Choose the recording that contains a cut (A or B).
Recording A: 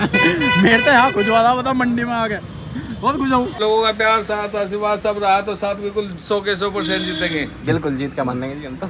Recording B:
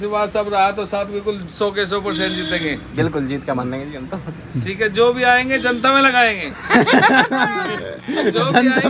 A